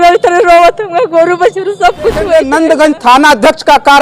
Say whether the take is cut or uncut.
cut